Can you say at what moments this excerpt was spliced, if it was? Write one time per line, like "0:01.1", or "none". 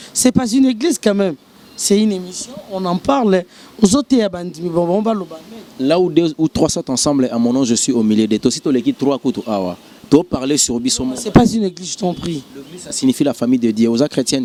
none